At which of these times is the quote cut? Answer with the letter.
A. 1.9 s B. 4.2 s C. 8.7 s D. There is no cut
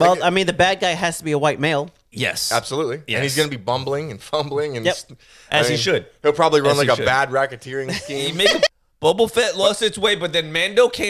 C